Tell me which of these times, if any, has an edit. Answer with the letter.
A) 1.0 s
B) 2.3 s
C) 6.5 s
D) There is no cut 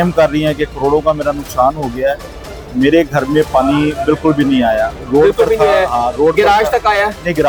D